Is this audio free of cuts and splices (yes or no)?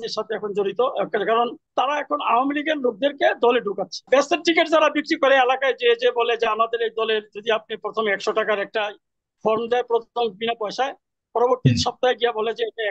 no